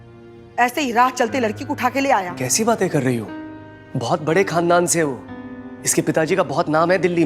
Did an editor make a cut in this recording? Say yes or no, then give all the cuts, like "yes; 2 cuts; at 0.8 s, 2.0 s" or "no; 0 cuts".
no; 0 cuts